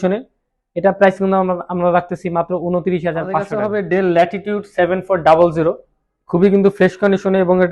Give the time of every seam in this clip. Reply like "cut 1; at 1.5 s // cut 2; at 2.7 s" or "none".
cut 1; at 3.5 s